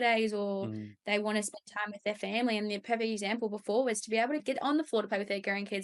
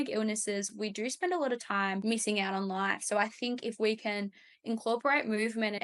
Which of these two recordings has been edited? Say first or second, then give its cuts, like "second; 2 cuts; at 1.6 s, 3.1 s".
second; 1 cut; at 2.0 s